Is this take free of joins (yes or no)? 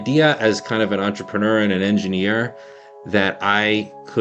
yes